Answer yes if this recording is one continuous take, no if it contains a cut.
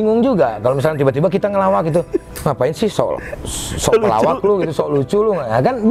yes